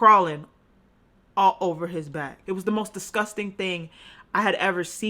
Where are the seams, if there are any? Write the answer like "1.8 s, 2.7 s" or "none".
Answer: 2.4 s